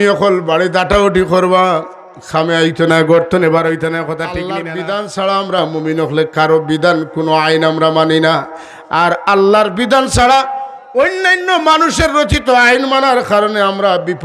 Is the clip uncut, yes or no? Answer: no